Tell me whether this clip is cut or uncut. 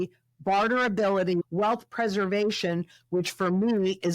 cut